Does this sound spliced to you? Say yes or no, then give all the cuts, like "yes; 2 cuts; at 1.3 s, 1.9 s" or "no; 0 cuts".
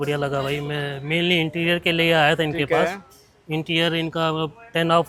no; 0 cuts